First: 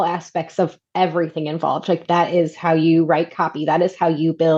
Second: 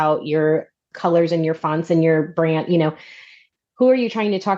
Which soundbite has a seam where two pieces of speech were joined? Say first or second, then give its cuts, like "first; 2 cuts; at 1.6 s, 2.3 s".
second; 2 cuts; at 0.9 s, 3.3 s